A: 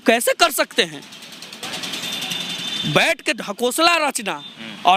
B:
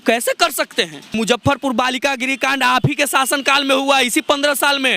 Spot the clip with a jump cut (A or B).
B